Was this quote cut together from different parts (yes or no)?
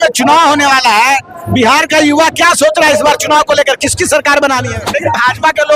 yes